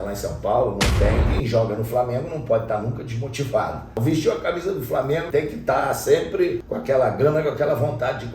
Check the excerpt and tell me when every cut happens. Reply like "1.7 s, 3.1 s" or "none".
1.3 s, 4.0 s, 5.3 s, 6.7 s